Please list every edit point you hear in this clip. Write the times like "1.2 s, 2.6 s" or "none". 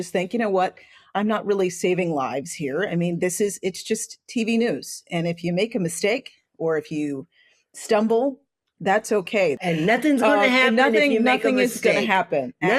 1.0 s, 9.6 s